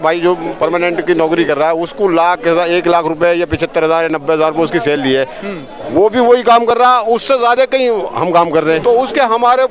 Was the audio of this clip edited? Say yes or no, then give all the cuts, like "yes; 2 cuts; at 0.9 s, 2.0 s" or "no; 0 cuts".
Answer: yes; 1 cut; at 8.8 s